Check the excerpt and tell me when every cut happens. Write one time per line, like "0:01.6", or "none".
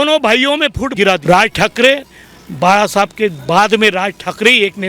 0:00.9